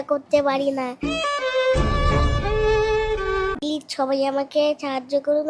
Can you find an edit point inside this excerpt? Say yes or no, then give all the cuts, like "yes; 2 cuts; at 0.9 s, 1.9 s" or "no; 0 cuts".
no; 0 cuts